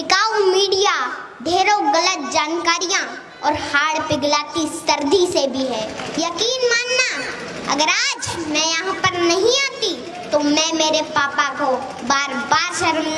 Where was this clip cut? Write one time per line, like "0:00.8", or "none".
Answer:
0:06.0